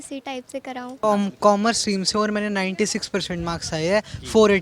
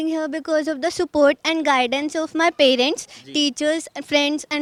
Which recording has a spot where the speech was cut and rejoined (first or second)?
first